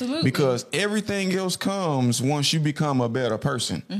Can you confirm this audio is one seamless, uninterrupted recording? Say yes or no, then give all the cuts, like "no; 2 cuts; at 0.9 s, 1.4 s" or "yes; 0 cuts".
yes; 0 cuts